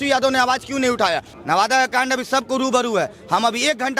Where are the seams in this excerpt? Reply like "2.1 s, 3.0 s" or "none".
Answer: 1.3 s